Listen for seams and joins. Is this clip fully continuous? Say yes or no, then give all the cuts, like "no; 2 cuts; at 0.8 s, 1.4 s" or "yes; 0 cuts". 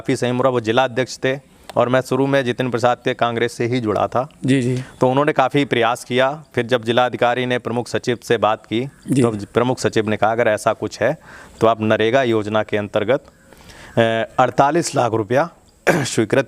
yes; 0 cuts